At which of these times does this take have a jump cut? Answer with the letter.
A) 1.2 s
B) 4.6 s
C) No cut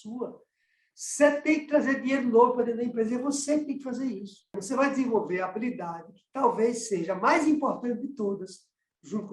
B